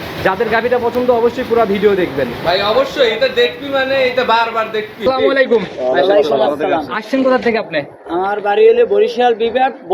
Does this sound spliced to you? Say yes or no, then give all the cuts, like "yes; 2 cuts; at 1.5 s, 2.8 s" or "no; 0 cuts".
yes; 1 cut; at 5.0 s